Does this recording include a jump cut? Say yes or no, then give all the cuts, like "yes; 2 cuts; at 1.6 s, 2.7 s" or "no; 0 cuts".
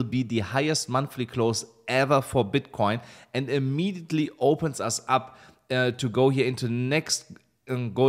no; 0 cuts